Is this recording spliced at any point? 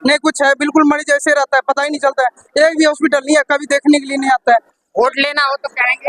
no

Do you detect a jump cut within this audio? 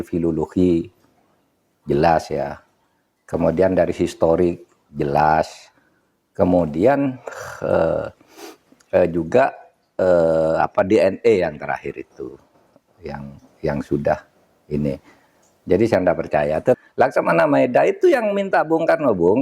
yes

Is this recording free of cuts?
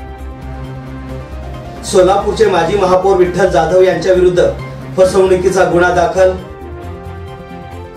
no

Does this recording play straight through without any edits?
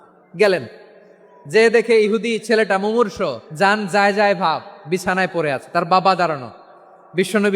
no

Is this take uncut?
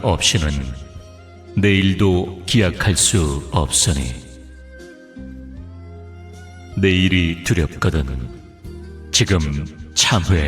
no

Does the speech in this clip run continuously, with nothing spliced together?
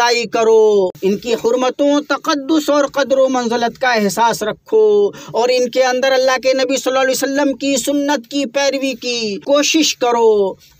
no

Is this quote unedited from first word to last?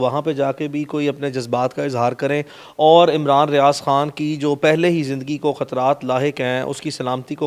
yes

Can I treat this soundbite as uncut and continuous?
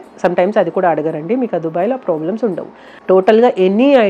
no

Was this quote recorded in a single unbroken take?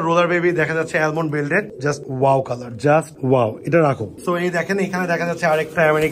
yes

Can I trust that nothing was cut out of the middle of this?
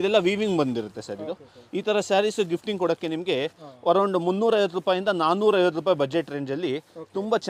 yes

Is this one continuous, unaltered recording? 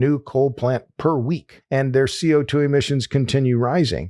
no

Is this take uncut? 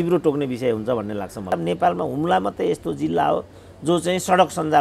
no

